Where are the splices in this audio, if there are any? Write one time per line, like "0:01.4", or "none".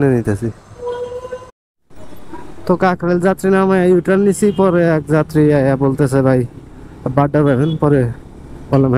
0:01.5